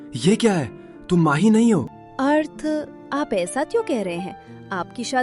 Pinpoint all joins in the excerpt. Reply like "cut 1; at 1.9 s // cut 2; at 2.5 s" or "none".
cut 1; at 1.9 s